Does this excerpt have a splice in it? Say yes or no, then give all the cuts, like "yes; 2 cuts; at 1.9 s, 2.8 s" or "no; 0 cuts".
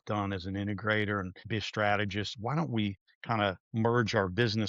yes; 2 cuts; at 1.4 s, 3.1 s